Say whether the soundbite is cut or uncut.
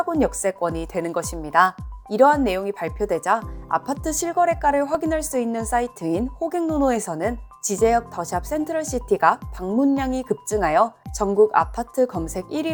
uncut